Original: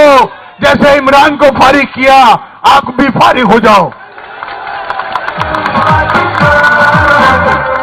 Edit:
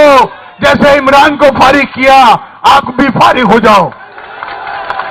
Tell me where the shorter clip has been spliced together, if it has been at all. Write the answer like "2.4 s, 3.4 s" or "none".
none